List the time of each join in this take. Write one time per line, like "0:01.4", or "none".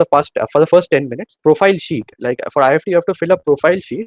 0:01.4